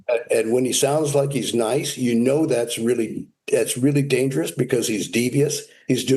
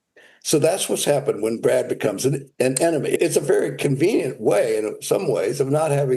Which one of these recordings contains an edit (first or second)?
second